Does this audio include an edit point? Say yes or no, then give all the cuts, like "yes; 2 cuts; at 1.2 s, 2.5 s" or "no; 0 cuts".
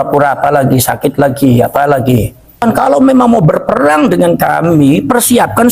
yes; 1 cut; at 2.6 s